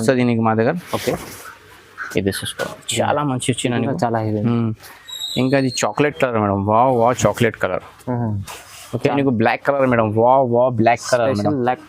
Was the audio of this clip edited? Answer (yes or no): yes